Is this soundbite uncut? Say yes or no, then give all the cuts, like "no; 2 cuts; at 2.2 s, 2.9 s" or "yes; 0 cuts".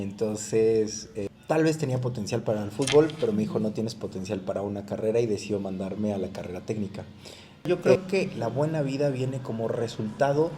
no; 2 cuts; at 1.1 s, 7.8 s